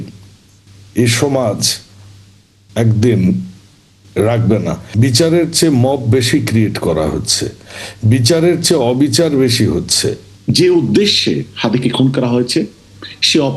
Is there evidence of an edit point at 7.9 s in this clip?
no; 2 cuts; at 4.8 s, 10.3 s

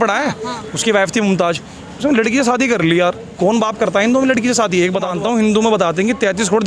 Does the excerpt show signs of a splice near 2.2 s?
no; 1 cut; at 5.1 s

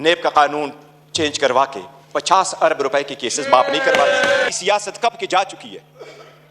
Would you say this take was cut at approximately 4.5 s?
yes; 1 cut; at 4.5 s

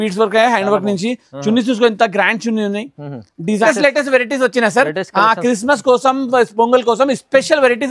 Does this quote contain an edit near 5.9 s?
no; 1 cut; at 3.7 s

